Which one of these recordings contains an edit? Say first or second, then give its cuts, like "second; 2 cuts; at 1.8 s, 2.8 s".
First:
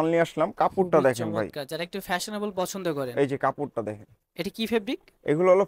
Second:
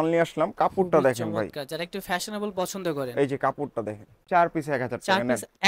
second; 1 cut; at 4.3 s